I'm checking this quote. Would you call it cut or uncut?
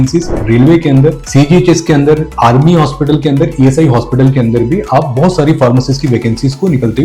uncut